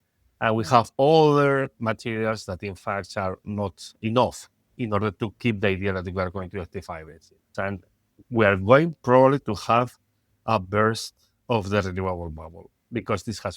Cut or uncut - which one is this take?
cut